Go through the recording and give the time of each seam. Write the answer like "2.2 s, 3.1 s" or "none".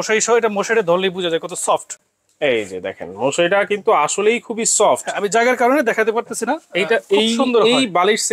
none